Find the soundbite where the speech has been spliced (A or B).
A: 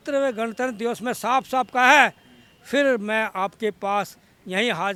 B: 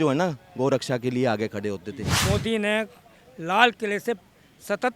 B